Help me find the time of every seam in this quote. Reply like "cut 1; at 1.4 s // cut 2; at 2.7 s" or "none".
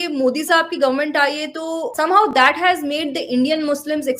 cut 1; at 1.9 s